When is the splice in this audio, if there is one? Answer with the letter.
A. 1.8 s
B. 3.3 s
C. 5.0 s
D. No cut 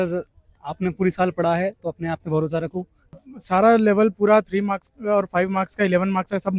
B